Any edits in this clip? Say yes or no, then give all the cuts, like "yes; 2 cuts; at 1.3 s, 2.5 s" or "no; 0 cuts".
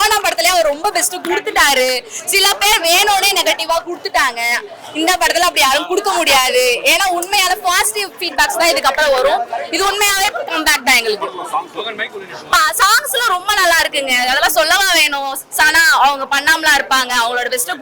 no; 0 cuts